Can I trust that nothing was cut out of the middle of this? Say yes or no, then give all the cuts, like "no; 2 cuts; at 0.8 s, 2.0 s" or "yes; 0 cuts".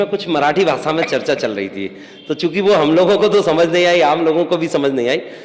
yes; 0 cuts